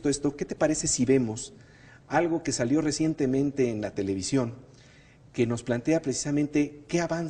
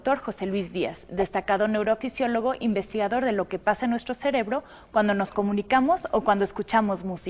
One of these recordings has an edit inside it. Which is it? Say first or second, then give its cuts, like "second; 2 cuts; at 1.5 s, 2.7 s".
second; 1 cut; at 4.1 s